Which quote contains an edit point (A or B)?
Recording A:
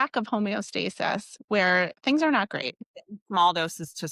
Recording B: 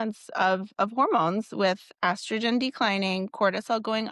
A